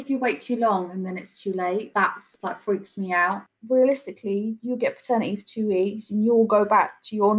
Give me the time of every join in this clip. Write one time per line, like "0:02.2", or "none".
0:01.9
0:03.5